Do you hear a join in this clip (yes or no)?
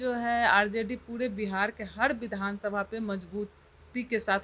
no